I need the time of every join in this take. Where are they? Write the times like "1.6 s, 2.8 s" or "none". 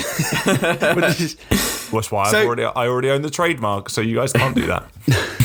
none